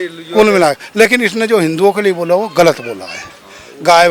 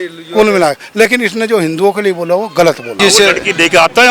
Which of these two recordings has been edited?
second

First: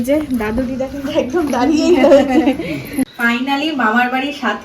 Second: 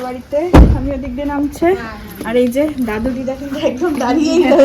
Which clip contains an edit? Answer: first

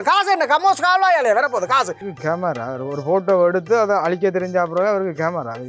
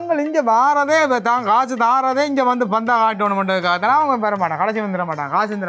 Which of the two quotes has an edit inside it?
first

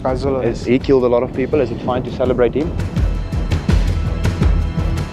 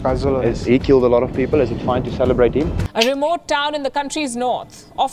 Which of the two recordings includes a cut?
second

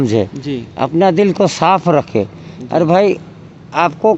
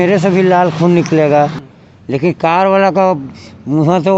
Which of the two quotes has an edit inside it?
second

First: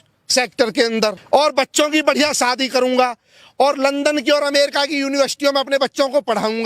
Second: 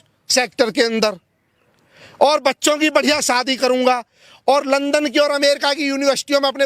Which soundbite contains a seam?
first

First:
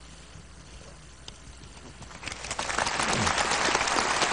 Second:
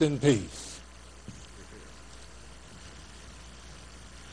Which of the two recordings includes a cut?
second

